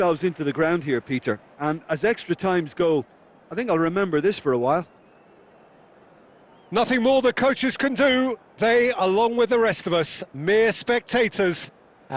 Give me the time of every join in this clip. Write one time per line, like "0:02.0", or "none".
none